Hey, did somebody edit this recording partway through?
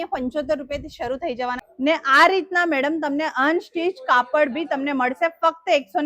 yes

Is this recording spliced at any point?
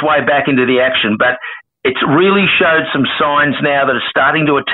no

